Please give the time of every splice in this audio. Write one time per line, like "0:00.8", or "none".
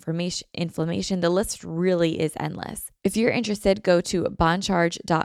0:02.8